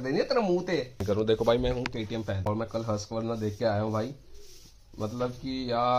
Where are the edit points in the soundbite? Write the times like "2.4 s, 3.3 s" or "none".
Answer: 1.0 s